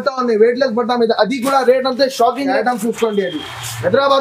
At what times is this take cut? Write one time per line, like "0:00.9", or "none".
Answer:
0:02.5